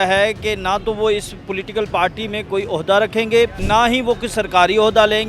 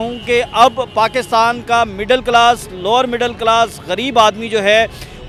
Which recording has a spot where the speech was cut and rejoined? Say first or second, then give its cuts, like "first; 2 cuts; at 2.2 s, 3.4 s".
first; 1 cut; at 3.6 s